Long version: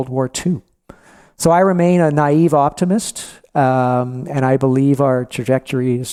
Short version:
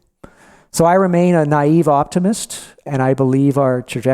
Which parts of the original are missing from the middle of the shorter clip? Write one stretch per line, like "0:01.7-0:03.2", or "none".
0:03.4-0:04.2